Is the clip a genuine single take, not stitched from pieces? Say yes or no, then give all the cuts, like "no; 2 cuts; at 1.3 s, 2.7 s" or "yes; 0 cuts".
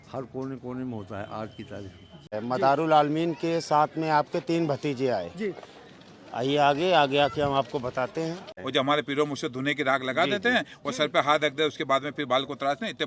no; 2 cuts; at 2.4 s, 8.6 s